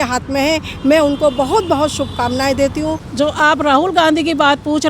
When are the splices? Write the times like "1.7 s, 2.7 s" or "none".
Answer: 3.0 s